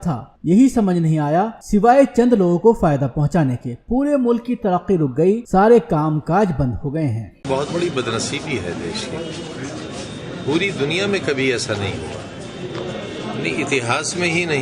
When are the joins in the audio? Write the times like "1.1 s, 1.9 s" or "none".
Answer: 13.5 s